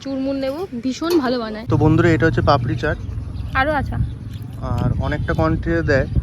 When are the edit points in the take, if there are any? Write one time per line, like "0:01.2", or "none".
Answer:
0:01.6